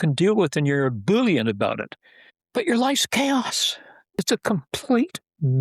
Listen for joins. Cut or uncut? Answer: cut